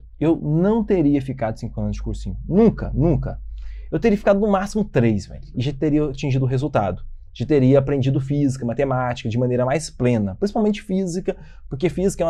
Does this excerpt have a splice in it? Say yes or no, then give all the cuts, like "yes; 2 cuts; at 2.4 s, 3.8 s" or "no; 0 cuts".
no; 0 cuts